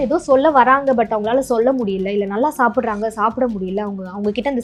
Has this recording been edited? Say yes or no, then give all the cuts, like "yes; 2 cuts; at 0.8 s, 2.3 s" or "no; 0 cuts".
no; 0 cuts